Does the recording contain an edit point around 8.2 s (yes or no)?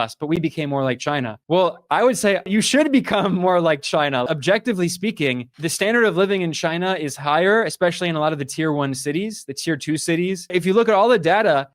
no